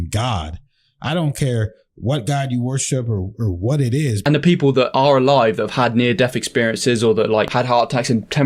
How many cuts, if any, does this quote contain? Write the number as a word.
one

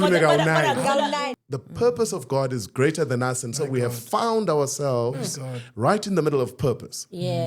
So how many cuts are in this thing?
one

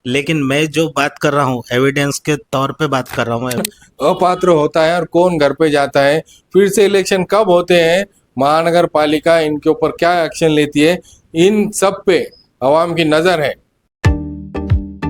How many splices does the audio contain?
one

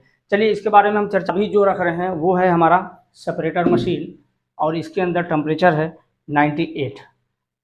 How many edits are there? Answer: one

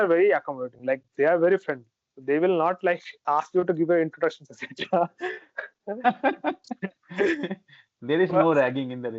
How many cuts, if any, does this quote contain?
zero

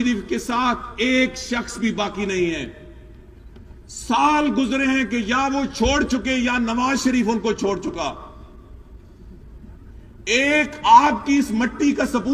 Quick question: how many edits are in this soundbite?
zero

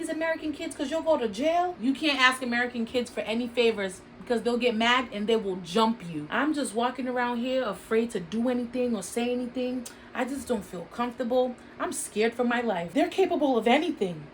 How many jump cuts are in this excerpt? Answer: one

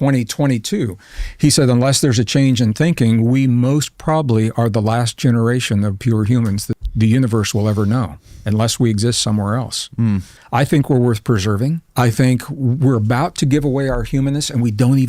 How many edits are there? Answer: three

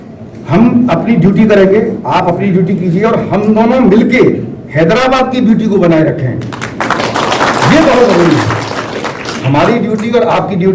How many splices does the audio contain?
zero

